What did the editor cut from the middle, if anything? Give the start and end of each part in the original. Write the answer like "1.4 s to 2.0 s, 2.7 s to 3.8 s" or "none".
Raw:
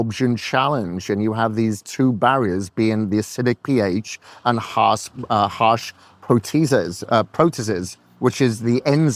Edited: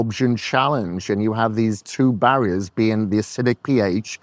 none